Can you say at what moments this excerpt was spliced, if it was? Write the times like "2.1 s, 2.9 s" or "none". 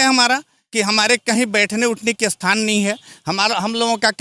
none